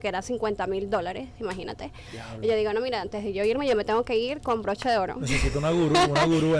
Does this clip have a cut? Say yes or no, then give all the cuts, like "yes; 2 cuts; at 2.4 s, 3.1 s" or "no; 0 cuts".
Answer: no; 0 cuts